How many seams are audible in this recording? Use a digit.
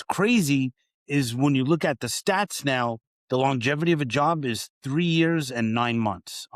1